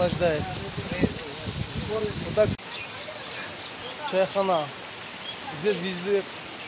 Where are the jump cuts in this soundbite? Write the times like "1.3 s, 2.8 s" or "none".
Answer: 2.5 s